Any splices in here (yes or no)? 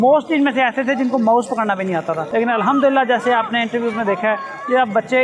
no